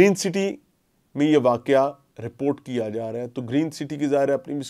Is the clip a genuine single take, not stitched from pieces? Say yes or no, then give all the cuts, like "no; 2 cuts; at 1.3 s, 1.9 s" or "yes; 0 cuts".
yes; 0 cuts